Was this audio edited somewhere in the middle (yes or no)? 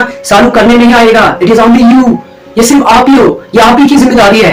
no